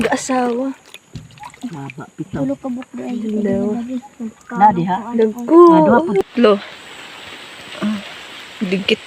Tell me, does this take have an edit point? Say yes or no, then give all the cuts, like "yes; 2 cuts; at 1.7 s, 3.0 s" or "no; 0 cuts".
yes; 1 cut; at 6.2 s